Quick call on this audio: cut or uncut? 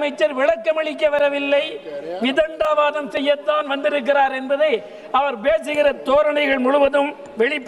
uncut